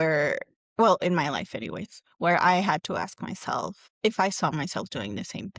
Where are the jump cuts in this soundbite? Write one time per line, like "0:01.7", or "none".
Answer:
0:03.8